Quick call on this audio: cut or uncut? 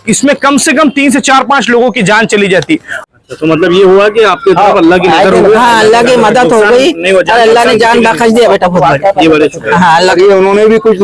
cut